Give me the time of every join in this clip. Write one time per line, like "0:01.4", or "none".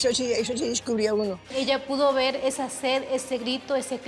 0:01.5